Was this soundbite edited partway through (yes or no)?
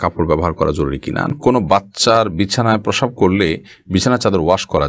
yes